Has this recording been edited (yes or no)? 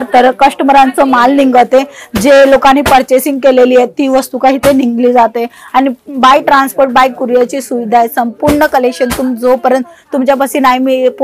no